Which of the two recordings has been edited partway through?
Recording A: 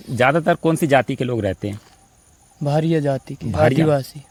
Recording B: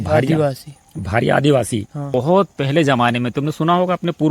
B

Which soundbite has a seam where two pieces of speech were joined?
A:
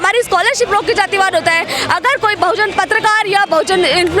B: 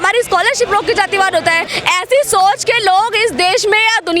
B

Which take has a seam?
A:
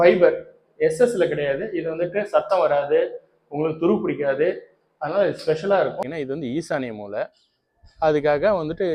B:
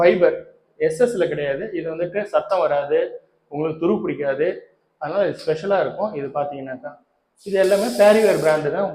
A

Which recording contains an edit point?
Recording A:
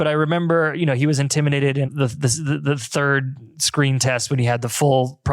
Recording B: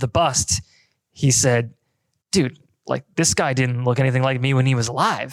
A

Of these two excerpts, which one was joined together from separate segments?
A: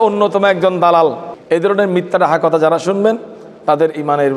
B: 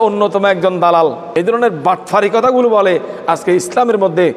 B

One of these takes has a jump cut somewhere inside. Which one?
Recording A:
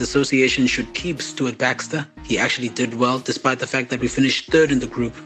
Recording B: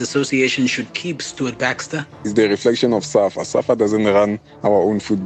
B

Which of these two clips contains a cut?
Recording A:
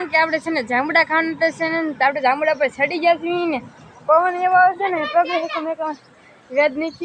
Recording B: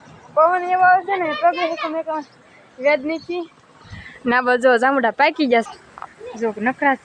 B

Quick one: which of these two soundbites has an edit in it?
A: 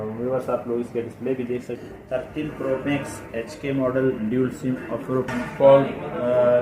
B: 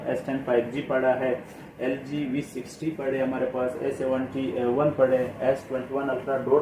A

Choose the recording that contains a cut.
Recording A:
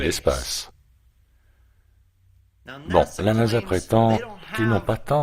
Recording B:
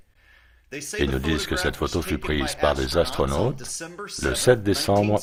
A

